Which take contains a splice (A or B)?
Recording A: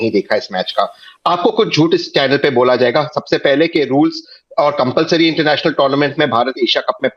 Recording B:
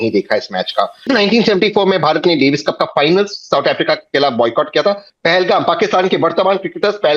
B